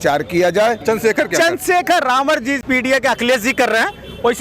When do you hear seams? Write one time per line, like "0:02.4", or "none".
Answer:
0:00.8
0:02.6